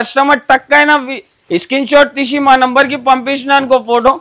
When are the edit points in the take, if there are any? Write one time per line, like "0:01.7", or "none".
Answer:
none